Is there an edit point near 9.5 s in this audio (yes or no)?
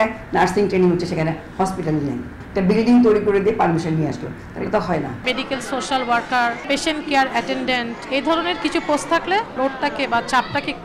yes